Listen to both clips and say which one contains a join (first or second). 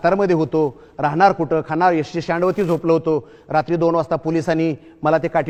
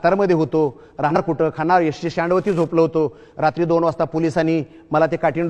second